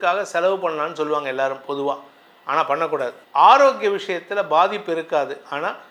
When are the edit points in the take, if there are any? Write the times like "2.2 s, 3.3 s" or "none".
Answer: 3.2 s